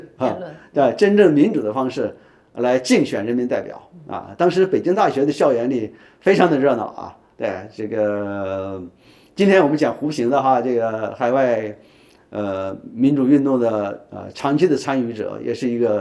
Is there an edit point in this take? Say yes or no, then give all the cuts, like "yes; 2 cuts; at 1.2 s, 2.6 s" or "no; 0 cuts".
no; 0 cuts